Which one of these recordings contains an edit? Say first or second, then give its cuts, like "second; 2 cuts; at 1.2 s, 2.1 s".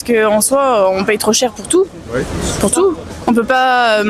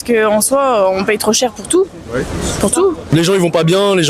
second; 1 cut; at 3.1 s